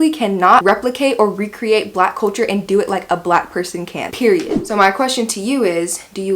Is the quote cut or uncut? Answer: cut